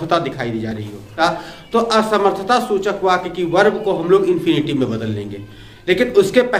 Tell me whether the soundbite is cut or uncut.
cut